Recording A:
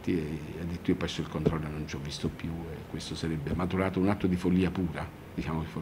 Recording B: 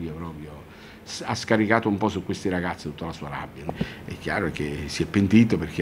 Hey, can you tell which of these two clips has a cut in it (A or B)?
B